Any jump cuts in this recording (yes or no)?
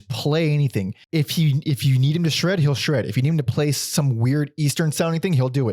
yes